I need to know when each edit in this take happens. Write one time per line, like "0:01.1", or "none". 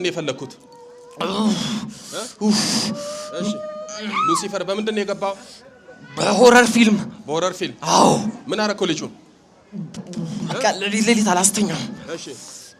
none